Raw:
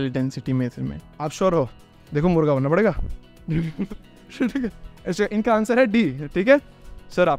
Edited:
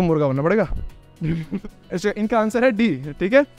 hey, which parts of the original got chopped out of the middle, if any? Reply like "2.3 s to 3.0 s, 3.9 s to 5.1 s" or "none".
4.0 s to 4.9 s